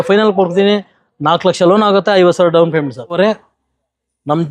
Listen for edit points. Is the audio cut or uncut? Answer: cut